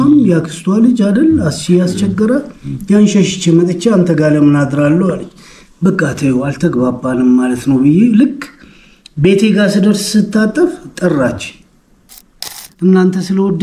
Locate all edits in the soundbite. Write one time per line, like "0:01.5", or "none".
0:12.6